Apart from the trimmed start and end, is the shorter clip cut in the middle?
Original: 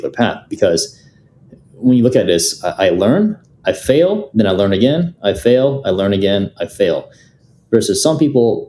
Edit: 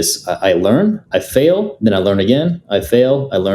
yes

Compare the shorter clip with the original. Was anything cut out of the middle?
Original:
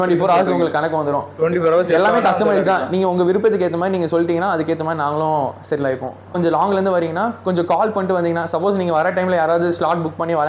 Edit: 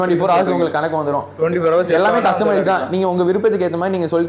no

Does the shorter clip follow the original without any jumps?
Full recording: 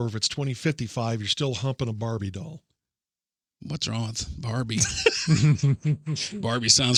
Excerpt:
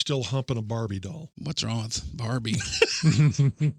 no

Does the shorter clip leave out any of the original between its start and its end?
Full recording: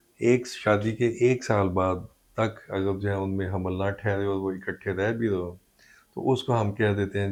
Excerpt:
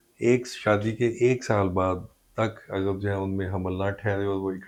no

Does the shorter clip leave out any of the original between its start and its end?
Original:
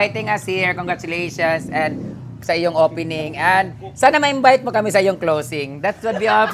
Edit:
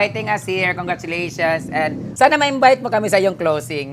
yes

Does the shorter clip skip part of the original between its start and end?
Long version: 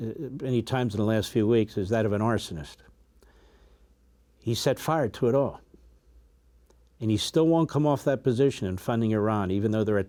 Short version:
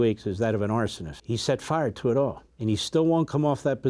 yes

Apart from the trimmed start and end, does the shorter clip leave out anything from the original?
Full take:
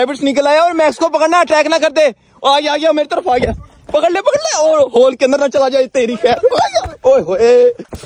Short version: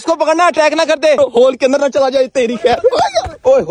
yes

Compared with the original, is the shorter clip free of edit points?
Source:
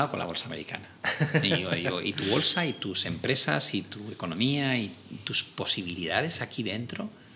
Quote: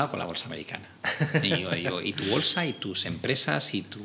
yes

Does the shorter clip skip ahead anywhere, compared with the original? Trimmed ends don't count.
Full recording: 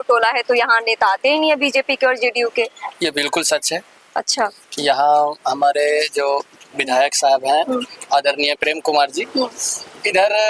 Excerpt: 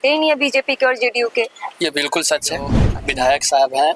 yes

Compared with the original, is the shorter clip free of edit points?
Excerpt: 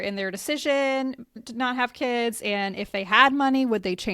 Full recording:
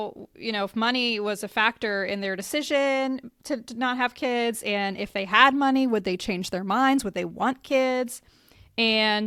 no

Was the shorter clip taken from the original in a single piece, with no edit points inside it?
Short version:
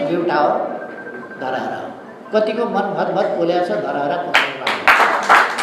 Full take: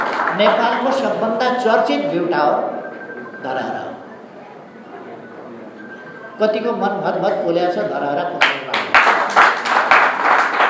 no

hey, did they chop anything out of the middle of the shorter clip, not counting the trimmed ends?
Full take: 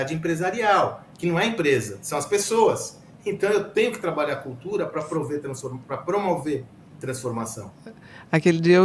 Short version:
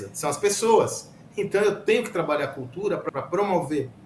yes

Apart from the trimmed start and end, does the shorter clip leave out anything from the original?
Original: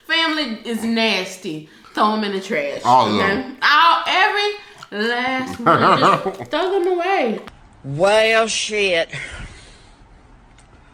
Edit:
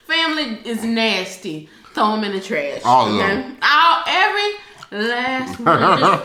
no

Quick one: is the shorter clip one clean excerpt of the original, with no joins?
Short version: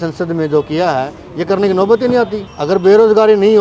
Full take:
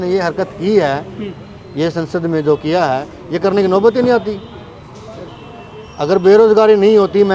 no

